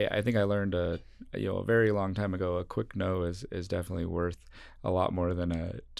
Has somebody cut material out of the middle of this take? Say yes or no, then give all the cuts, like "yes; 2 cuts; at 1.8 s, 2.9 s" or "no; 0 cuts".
no; 0 cuts